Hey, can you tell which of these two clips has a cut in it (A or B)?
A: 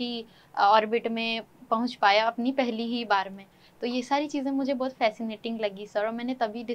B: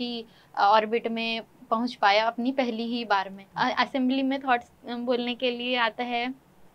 B